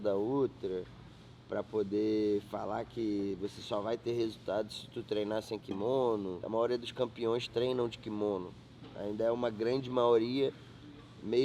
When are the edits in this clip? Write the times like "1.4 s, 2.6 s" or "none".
6.4 s